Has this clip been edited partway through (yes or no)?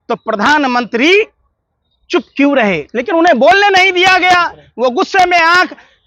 yes